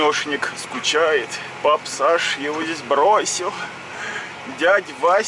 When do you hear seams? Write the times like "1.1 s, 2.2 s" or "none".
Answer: 1.4 s